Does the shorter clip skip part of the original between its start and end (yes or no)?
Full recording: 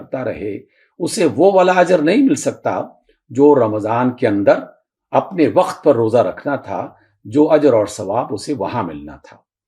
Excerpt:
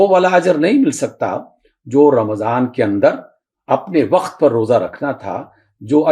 no